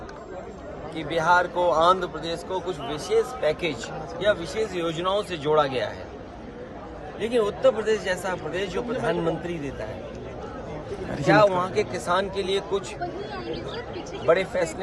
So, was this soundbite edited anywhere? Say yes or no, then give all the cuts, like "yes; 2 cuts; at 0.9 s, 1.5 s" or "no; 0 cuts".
no; 0 cuts